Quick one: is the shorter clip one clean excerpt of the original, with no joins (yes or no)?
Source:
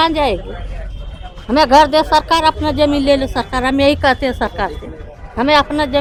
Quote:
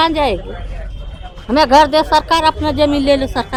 yes